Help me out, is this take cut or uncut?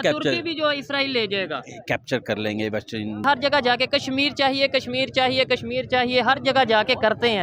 cut